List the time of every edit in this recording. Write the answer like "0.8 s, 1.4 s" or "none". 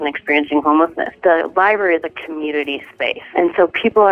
1.2 s, 3.2 s

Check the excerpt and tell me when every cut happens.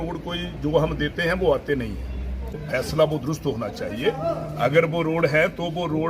2.5 s

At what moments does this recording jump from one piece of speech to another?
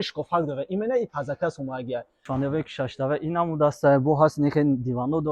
2.2 s

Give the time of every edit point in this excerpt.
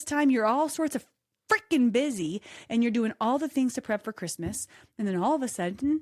none

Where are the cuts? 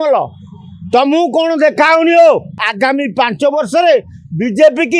2.6 s

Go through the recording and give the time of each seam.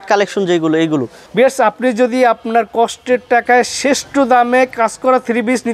1.2 s

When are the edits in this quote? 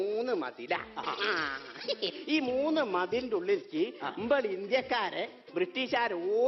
none

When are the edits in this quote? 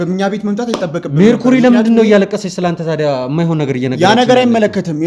none

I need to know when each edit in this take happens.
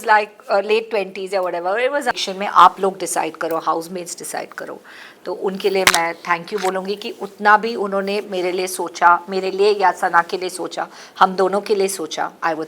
2.1 s

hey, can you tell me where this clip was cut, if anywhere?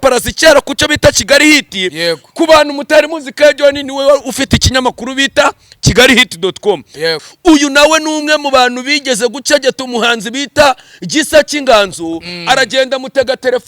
7.2 s

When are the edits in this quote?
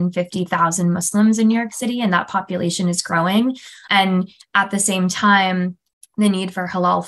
none

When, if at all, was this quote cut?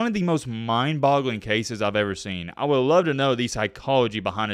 none

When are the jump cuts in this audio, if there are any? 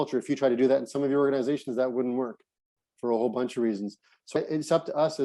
none

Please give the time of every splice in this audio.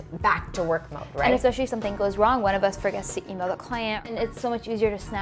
4.1 s

